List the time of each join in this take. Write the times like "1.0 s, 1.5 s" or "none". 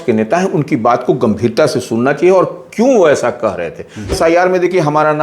4.2 s